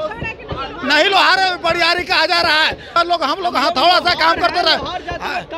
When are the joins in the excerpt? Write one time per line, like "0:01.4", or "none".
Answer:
0:02.9